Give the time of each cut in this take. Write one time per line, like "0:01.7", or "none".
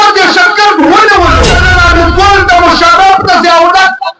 0:01.6